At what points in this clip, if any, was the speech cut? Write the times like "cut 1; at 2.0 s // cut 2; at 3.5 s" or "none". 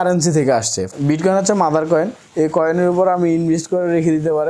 cut 1; at 0.9 s